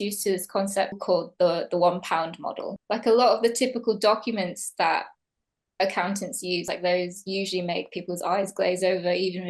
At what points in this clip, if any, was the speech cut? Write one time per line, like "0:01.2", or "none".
0:02.7
0:06.6